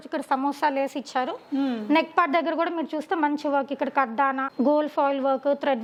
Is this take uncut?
yes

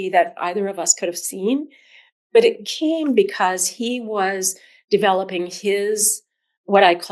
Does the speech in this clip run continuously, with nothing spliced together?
yes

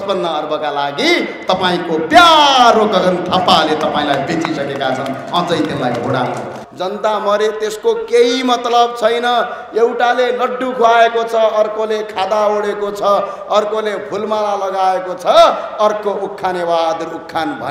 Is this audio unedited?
no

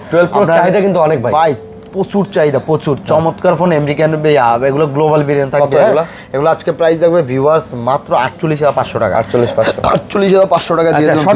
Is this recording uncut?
yes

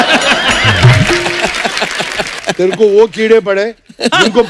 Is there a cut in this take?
yes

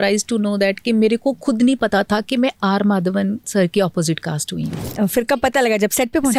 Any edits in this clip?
no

